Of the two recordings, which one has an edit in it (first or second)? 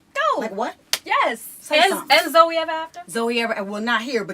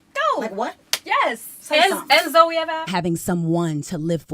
first